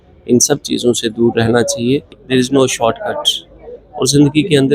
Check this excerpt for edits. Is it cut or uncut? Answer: cut